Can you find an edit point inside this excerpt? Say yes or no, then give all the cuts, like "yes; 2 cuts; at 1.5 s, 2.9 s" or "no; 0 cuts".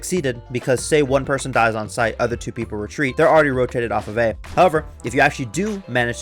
yes; 2 cuts; at 3.1 s, 4.4 s